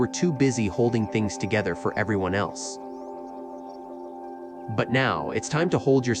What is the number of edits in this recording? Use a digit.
2